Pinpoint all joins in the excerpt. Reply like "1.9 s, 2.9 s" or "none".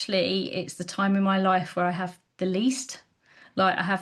none